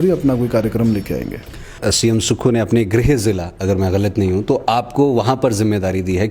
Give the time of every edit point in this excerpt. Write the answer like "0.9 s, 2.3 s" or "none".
1.7 s